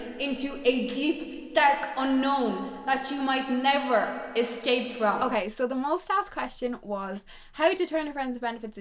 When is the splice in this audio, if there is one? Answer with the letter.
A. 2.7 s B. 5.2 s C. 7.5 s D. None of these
B